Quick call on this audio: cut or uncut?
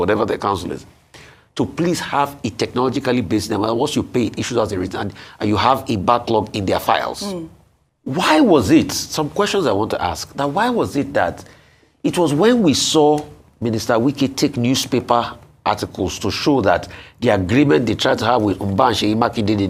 uncut